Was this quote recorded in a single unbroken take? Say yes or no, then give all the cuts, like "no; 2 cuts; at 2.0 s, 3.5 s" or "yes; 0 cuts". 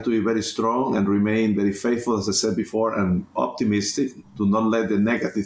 yes; 0 cuts